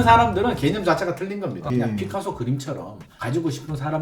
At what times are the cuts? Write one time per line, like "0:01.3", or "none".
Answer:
0:01.6

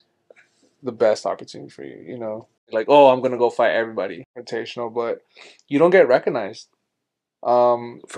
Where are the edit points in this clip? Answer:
0:02.7
0:04.2

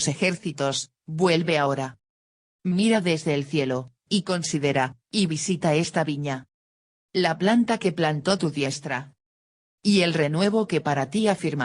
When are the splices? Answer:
none

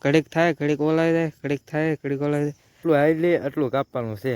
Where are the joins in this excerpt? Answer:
0:02.8

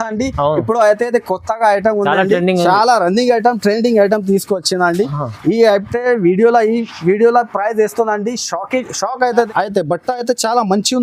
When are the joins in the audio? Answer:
0:09.5

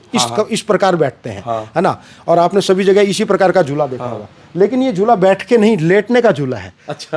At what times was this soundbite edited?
none

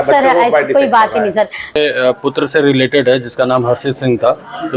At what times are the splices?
0:01.8

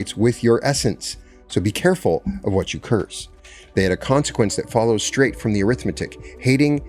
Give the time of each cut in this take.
none

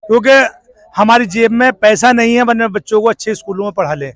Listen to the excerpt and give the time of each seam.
none

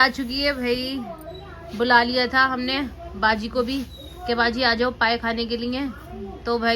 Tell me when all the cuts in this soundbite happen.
none

